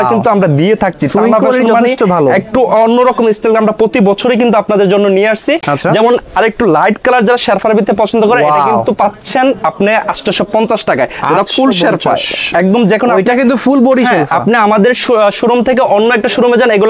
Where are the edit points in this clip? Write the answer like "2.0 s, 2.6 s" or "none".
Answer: none